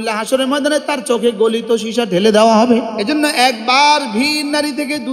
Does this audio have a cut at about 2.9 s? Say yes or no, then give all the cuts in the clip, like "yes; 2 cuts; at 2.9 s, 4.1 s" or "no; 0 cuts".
yes; 1 cut; at 2.9 s